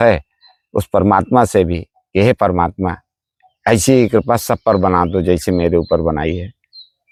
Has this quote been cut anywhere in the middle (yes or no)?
no